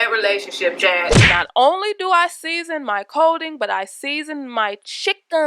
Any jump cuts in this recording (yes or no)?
yes